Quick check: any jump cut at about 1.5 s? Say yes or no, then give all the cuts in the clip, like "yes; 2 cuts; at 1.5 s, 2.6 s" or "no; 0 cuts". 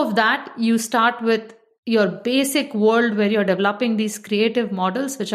no; 0 cuts